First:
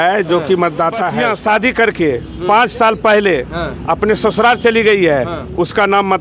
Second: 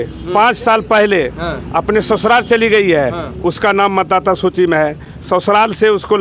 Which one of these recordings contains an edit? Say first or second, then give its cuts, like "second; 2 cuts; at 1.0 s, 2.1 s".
first; 1 cut; at 1.1 s